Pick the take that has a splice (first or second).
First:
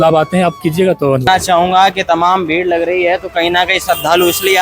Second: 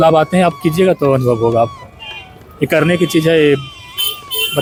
first